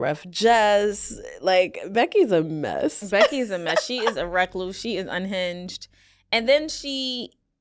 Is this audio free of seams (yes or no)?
yes